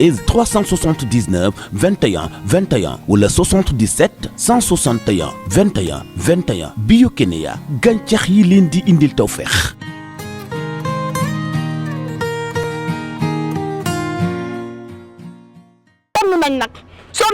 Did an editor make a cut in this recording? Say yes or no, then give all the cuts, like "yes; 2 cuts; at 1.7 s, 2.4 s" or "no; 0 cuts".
yes; 1 cut; at 16.1 s